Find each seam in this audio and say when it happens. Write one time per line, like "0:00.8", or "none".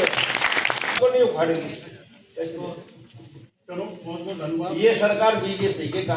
0:01.0